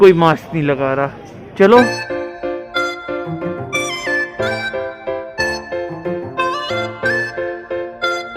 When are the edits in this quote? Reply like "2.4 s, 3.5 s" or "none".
2.1 s